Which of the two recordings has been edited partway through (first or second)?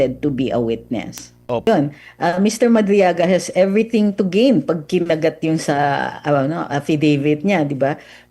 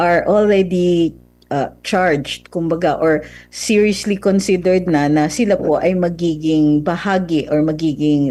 first